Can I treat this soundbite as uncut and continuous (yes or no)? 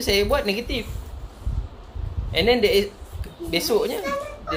yes